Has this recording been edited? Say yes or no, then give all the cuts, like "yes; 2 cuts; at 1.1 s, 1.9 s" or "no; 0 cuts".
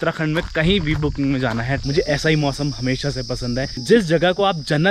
yes; 1 cut; at 1.8 s